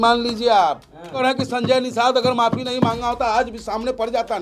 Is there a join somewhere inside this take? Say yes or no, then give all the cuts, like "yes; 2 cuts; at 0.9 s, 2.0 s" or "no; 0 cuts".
yes; 1 cut; at 1.2 s